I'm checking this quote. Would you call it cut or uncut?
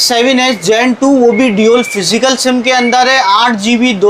uncut